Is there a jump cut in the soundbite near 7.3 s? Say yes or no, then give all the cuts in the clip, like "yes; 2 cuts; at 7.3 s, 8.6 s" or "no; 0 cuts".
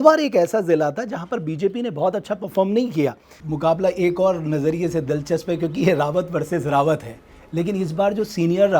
no; 1 cut; at 3.4 s